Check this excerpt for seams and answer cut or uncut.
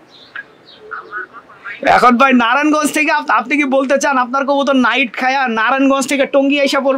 uncut